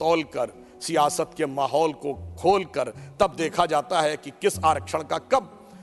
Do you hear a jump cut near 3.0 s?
no; 0 cuts

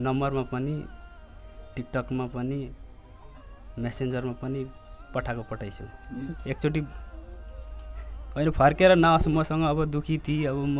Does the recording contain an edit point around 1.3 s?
no; 1 cut; at 6.3 s

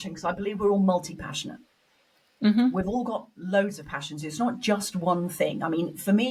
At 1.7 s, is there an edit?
no; 0 cuts

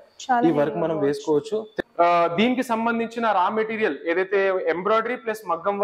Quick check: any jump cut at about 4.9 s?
no; 1 cut; at 1.7 s

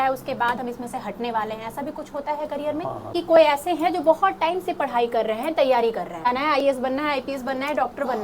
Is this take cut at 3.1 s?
yes; 2 cuts; at 3.1 s, 6.2 s

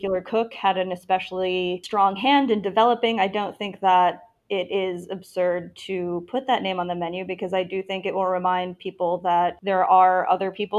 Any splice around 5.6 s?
no; 2 cuts; at 1.8 s, 9.6 s

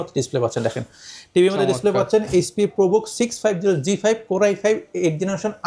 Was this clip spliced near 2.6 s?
no; 0 cuts

